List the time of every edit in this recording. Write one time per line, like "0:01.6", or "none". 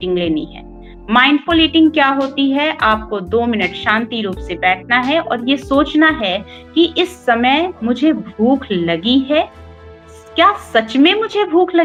none